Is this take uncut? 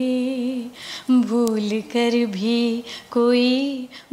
yes; 0 cuts

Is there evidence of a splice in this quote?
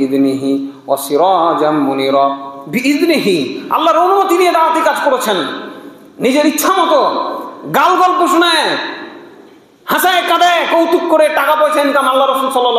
no; 0 cuts

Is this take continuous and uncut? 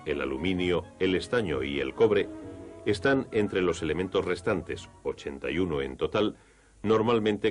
no; 1 cut; at 3.7 s

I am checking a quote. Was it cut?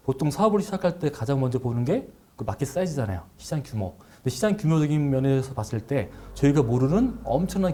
no; 0 cuts

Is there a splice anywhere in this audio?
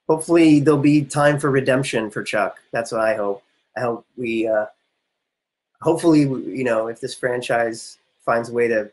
no; 0 cuts

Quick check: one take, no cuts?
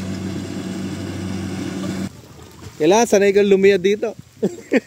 no; 1 cut; at 2.2 s

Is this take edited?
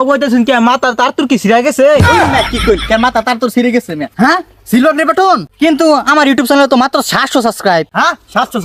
yes; 1 cut; at 4.1 s

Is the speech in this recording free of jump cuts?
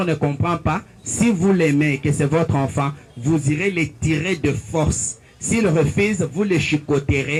yes; 0 cuts

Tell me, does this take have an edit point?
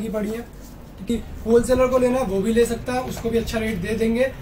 yes; 1 cut; at 1.1 s

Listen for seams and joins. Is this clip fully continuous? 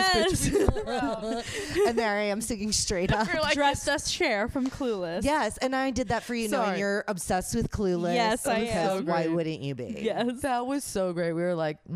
yes; 0 cuts

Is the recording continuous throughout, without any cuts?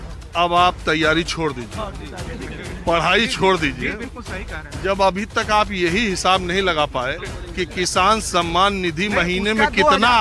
yes; 0 cuts

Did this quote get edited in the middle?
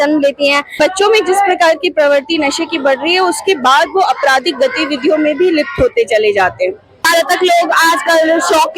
yes; 2 cuts; at 0.8 s, 7.0 s

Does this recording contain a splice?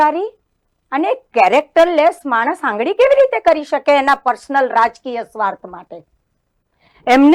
no; 0 cuts

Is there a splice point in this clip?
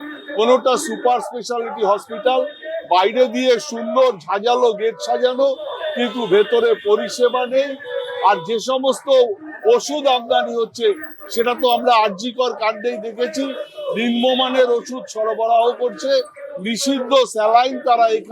no; 0 cuts

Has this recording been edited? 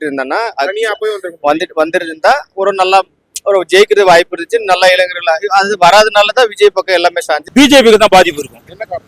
yes; 1 cut; at 7.4 s

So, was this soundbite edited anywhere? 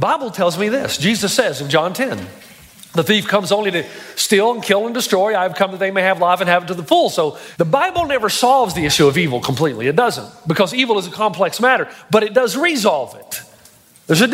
yes; 1 cut; at 7.4 s

